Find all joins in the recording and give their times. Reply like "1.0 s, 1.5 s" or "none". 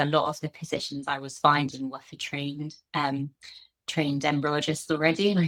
none